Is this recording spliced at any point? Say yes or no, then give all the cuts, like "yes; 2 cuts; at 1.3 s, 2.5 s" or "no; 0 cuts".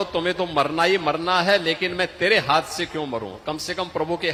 no; 0 cuts